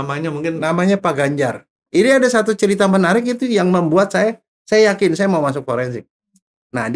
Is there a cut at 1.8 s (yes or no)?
yes